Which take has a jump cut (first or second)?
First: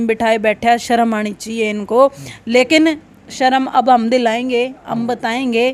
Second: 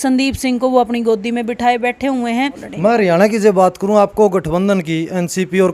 second